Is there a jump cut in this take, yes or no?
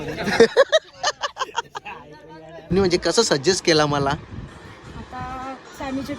yes